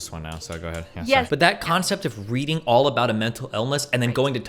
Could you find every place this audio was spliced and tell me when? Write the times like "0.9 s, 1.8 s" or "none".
1.3 s